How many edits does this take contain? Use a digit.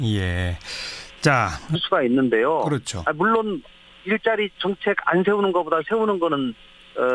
0